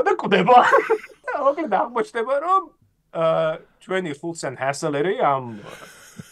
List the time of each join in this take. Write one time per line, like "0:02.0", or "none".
0:01.2